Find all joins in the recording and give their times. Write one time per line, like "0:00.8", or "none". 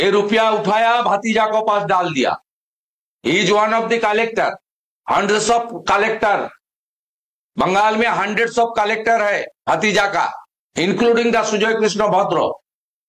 none

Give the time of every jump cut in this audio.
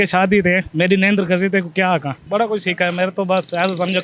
0:02.1

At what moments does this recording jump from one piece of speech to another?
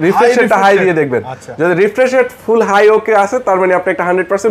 none

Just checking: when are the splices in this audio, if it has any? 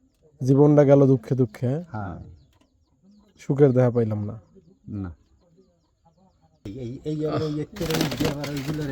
0:06.7

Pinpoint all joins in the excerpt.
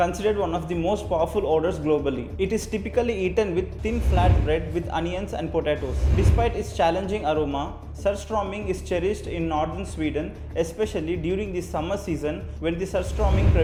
none

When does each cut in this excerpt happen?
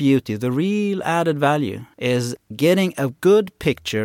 0:01.9

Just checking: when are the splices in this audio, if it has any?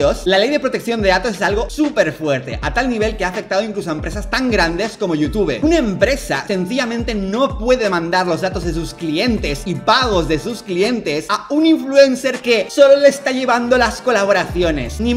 none

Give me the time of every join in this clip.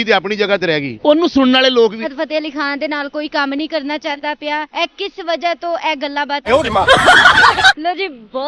0:02.0
0:06.5

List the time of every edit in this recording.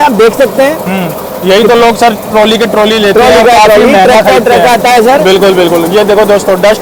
none

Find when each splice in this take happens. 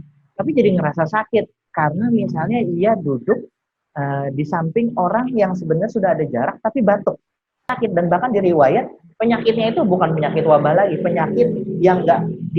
0:07.7

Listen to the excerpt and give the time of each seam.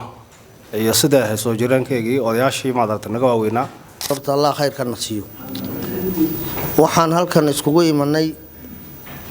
0:04.1

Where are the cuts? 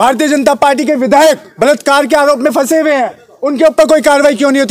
none

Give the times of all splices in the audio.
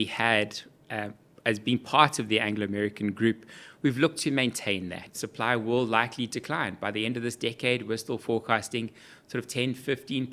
0:05.1

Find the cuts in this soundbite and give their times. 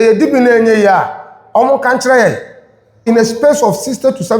0:03.0

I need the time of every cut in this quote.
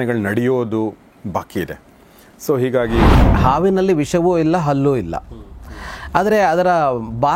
0:03.3

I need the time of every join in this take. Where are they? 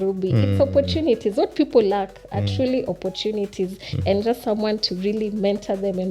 none

